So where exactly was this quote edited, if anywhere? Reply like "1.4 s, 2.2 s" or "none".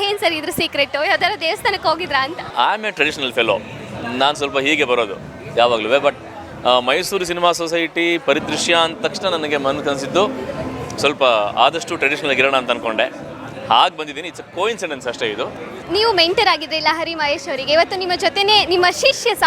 2.4 s, 15.8 s